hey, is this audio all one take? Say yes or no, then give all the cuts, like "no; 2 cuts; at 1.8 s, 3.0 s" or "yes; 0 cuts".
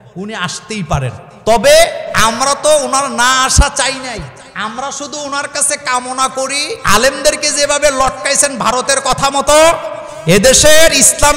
no; 4 cuts; at 1.3 s, 2.1 s, 4.4 s, 6.7 s